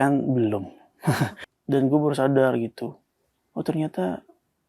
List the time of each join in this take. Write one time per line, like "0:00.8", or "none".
0:01.5

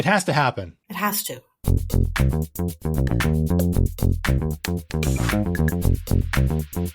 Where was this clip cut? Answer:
0:01.1

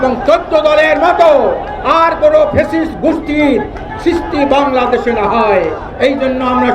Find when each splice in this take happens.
none

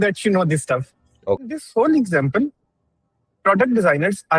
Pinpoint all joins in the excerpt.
0:01.5

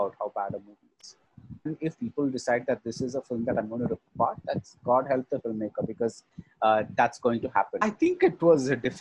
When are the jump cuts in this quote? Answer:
0:01.7
0:07.8

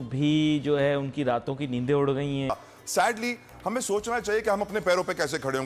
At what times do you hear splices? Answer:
0:02.5

